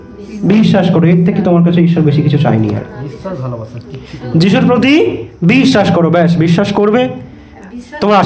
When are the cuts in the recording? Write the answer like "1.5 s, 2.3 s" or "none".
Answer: none